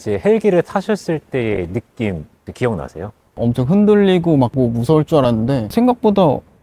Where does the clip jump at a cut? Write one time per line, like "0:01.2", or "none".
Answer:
0:03.4